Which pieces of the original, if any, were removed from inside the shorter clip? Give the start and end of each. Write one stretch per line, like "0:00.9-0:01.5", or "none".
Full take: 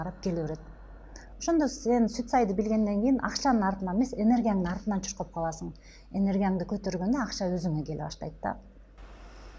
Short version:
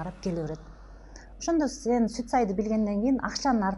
none

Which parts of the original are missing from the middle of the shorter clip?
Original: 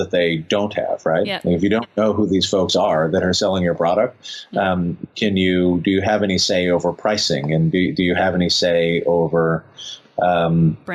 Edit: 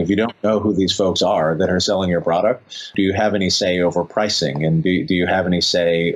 0:04.5-0:05.8

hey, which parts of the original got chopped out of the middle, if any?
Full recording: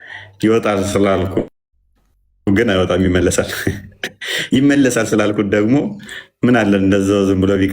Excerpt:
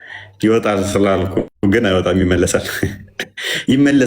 0:01.5-0:02.4

